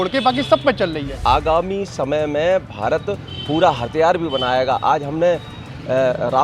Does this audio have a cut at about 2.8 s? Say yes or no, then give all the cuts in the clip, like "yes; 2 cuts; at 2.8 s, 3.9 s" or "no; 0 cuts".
no; 1 cut; at 1.2 s